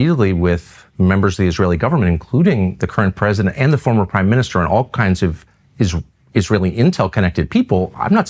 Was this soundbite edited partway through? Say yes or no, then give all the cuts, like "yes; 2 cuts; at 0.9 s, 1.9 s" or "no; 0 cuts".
no; 0 cuts